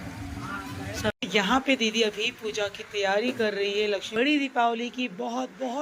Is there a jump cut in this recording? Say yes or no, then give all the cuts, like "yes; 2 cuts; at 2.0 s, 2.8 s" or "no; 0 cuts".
yes; 2 cuts; at 1.1 s, 4.1 s